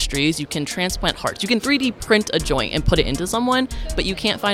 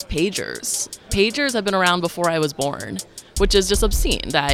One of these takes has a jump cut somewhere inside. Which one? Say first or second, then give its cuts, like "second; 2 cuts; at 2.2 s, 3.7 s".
second; 1 cut; at 0.9 s